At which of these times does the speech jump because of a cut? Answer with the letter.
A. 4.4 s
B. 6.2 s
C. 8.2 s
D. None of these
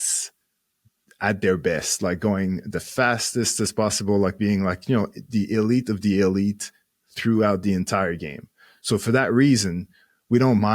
D